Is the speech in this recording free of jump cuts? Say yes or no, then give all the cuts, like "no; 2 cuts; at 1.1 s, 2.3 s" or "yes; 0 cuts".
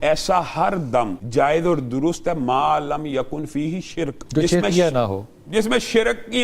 no; 2 cuts; at 1.2 s, 4.2 s